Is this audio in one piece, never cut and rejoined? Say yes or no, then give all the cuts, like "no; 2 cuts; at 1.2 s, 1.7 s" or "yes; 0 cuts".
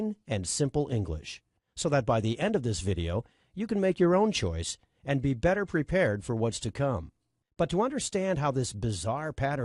yes; 0 cuts